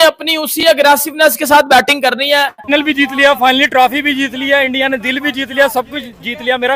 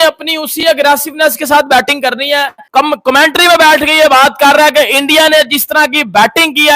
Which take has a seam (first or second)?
first